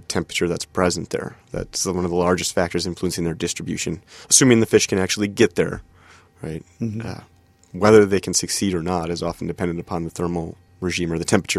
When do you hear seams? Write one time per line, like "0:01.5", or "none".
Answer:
0:10.6